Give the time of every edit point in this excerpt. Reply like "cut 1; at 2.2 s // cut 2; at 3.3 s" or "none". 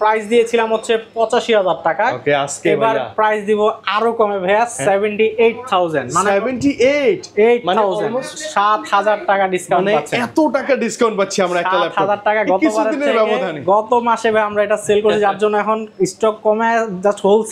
none